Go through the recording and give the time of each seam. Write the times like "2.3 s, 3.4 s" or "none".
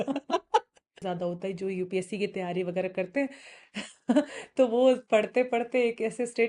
1.0 s